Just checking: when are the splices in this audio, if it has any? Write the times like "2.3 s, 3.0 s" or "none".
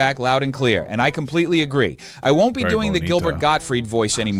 none